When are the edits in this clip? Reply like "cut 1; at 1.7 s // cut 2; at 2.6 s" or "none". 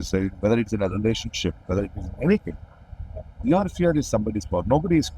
none